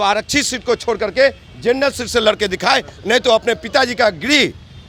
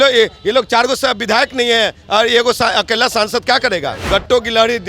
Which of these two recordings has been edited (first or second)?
second